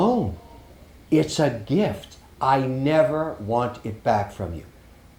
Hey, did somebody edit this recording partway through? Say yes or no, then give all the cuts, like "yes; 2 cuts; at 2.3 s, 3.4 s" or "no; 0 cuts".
no; 0 cuts